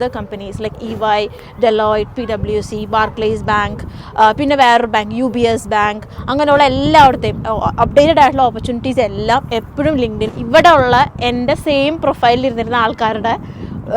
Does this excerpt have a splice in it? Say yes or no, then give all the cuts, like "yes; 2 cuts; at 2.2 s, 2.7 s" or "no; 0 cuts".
yes; 1 cut; at 10.3 s